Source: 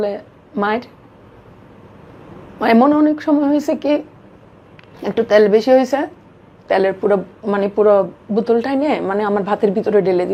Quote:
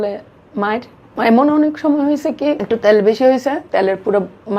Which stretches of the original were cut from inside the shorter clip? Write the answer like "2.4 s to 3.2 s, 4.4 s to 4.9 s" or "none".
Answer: 1.0 s to 2.4 s, 4.0 s to 5.1 s, 6.1 s to 6.6 s